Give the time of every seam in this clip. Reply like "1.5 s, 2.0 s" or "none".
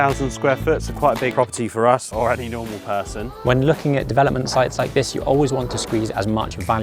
2.1 s, 3.3 s